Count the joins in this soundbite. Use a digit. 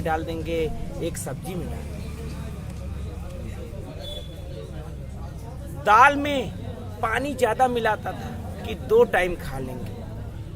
0